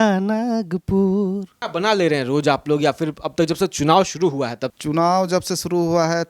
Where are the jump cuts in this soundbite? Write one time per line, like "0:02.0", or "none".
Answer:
0:01.6
0:04.7